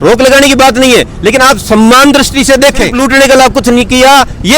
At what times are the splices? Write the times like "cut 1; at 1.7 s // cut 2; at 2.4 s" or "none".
cut 1; at 2.9 s

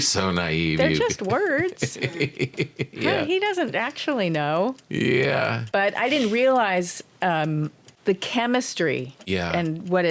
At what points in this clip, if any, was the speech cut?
cut 1; at 5.6 s // cut 2; at 7.8 s // cut 3; at 9.1 s

